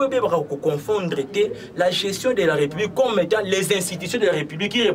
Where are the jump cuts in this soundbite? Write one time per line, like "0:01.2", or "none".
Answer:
none